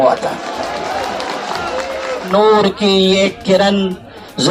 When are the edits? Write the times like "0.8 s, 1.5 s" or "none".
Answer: 2.3 s